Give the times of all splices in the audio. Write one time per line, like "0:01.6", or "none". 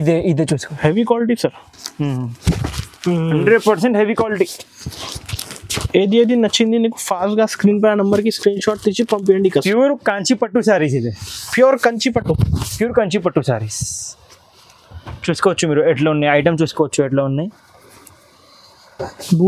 0:09.6